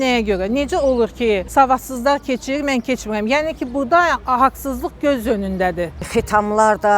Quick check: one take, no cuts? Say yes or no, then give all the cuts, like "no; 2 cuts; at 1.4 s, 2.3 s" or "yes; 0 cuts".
no; 2 cuts; at 1.5 s, 6.1 s